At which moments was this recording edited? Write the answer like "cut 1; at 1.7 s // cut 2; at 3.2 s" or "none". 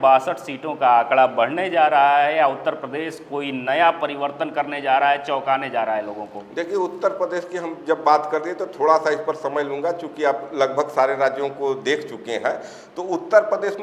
none